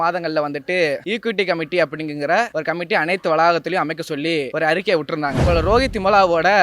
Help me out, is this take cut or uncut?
cut